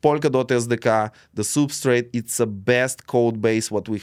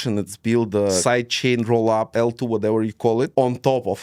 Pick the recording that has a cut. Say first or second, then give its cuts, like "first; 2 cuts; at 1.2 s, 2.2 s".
second; 3 cuts; at 1.0 s, 2.1 s, 3.3 s